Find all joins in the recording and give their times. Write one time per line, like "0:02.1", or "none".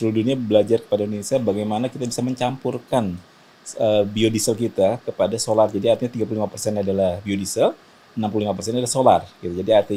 none